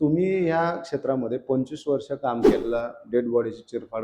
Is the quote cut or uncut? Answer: cut